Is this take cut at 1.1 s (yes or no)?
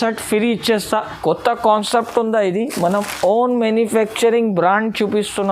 yes